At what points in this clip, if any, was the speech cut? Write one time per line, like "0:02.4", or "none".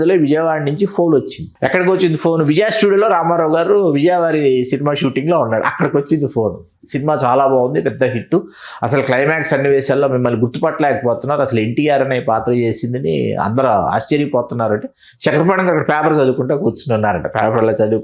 0:01.4